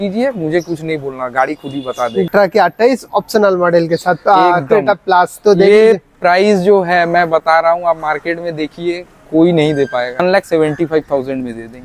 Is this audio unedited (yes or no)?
no